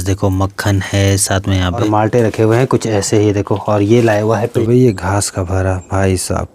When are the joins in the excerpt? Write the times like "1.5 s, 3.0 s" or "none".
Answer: 1.7 s, 4.6 s